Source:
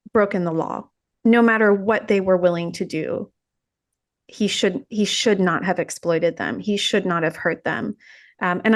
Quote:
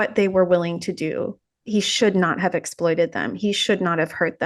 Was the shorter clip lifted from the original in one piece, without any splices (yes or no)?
no